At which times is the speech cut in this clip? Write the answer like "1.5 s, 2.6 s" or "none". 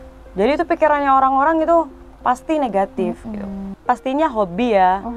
3.7 s